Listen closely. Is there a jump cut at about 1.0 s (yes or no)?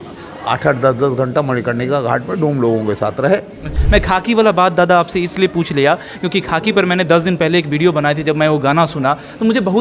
no